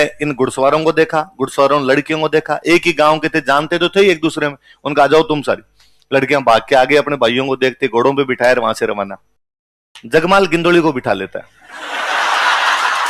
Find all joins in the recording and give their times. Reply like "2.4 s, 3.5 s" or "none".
none